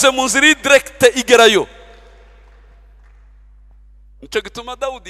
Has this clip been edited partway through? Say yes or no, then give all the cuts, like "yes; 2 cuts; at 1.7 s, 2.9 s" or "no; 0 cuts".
no; 0 cuts